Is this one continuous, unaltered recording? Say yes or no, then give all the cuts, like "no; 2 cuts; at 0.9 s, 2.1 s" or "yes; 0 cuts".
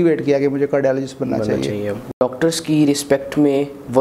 no; 1 cut; at 2.2 s